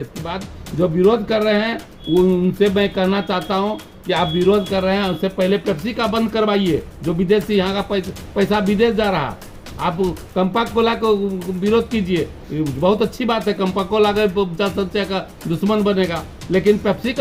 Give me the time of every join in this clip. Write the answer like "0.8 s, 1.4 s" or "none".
none